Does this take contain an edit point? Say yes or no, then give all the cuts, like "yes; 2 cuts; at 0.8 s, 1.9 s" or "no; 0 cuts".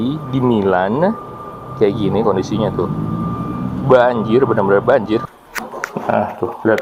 yes; 1 cut; at 5.3 s